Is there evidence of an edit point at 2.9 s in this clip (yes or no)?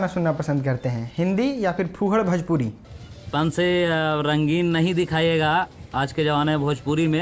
yes